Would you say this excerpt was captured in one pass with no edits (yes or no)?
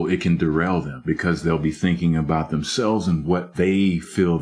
no